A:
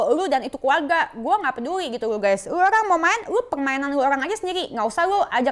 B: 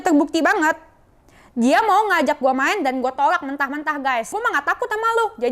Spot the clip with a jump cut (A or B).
B